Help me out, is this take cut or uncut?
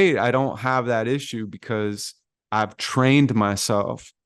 uncut